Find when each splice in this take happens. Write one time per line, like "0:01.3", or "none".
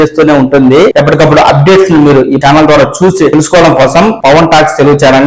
0:00.9
0:02.4
0:03.3
0:04.2